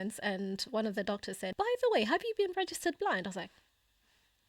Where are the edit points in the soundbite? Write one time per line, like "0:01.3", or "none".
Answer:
0:01.5